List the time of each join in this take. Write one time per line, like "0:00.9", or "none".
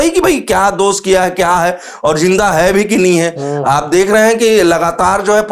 none